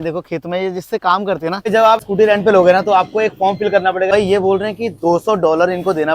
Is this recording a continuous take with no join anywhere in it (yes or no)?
no